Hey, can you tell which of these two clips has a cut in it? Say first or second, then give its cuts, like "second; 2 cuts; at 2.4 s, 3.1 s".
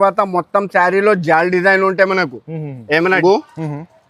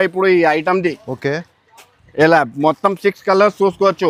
first; 1 cut; at 3.2 s